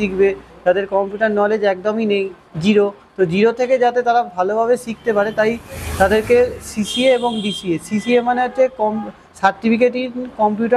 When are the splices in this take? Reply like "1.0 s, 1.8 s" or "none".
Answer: none